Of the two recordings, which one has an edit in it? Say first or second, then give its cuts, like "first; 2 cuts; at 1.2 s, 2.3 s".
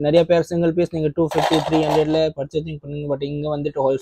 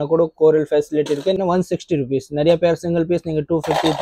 second; 1 cut; at 1.4 s